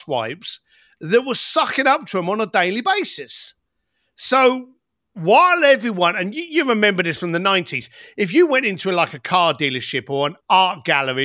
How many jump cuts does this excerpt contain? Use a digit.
1